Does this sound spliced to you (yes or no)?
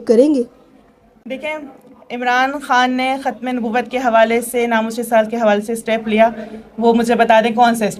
no